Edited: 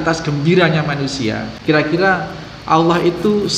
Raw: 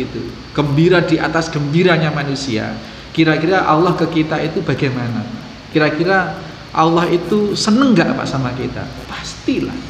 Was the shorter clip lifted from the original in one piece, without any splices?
no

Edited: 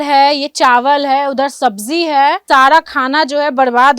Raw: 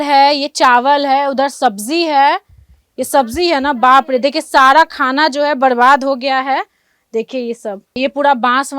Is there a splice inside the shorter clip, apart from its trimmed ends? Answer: yes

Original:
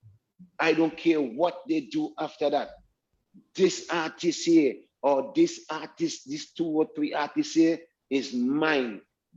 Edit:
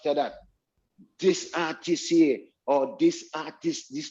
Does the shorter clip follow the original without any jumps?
yes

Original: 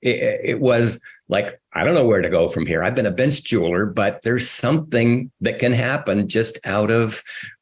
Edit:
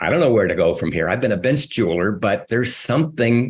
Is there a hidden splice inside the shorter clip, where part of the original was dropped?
no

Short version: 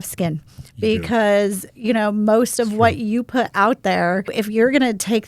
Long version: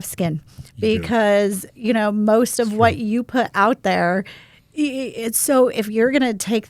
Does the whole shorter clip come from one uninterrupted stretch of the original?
no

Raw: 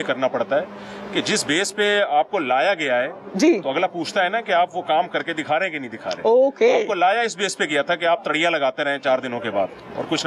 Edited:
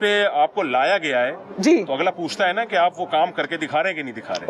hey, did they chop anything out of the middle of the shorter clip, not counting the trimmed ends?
no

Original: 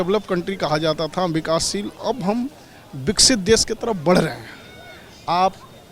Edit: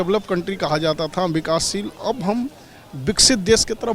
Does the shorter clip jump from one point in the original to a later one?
no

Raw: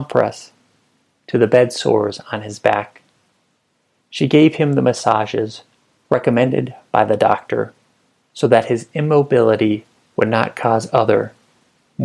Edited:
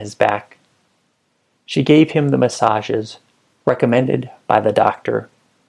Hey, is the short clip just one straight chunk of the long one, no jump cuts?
yes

